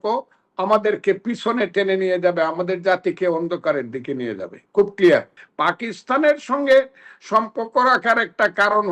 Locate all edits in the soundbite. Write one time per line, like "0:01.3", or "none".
0:05.4